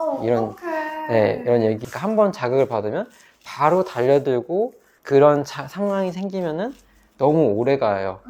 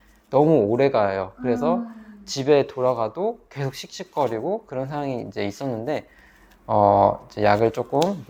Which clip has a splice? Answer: first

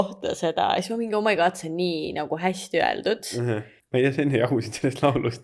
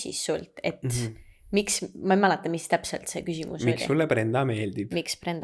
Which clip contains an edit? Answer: first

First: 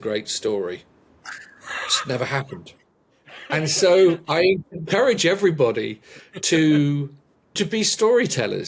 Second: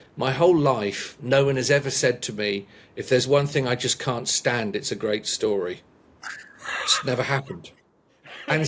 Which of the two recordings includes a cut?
first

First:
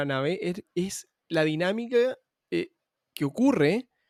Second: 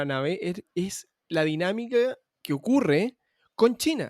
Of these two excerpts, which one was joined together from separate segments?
second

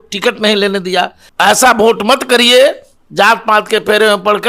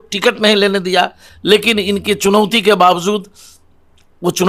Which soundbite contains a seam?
first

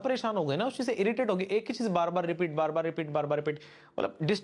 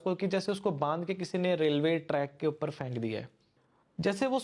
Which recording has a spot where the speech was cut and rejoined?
second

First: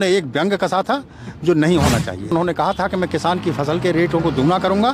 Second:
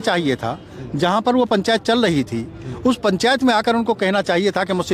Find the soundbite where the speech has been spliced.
first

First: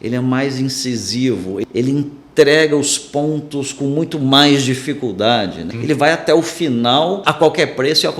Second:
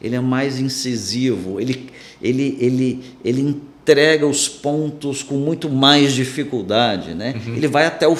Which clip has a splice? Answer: first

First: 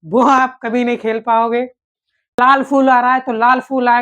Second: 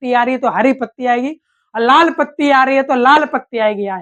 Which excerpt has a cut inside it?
first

